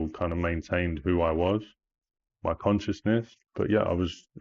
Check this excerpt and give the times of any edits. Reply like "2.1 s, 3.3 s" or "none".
3.4 s